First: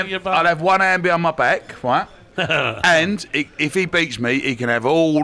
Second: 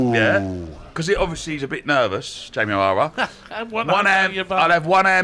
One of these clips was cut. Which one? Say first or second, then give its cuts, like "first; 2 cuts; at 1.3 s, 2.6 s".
first; 1 cut; at 2.2 s